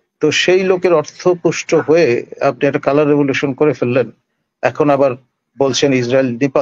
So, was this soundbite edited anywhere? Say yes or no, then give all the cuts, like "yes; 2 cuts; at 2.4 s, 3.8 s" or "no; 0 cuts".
no; 0 cuts